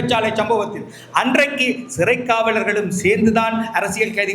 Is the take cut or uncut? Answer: uncut